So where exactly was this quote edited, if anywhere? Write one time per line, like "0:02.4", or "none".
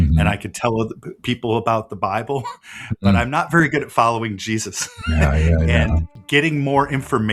0:06.1